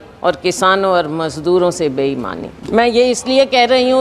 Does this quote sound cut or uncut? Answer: cut